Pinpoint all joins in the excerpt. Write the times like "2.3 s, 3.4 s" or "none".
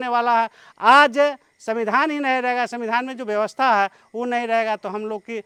none

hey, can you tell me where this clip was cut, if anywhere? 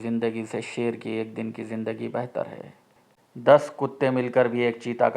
3.3 s

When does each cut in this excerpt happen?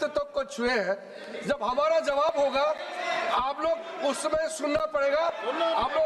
none

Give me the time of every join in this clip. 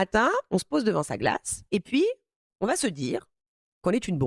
1.5 s

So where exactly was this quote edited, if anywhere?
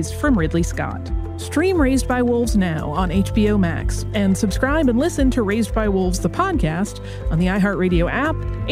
none

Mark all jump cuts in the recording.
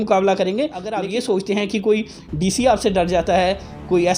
0.9 s

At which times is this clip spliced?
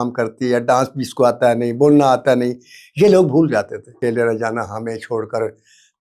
3.9 s

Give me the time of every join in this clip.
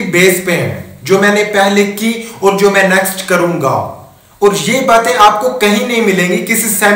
none

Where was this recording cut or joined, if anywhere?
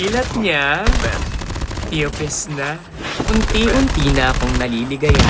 3.3 s

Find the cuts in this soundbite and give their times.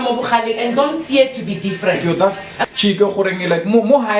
2.0 s

